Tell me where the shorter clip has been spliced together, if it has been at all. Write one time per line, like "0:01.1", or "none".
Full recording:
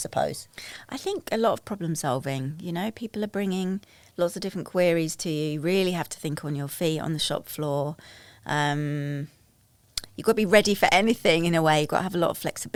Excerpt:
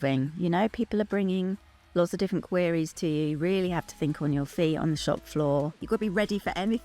0:05.8